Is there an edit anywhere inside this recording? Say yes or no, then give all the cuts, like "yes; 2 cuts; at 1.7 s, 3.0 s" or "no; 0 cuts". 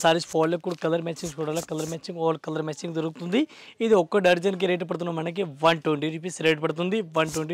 no; 0 cuts